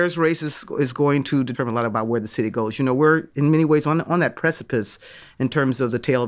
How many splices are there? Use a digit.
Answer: 1